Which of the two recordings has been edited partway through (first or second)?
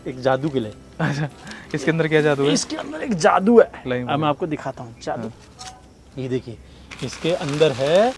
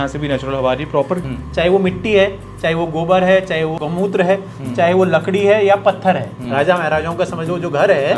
second